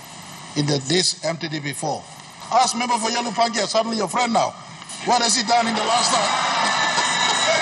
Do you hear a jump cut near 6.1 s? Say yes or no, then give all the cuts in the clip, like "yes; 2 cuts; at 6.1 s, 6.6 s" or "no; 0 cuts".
no; 1 cut; at 2.3 s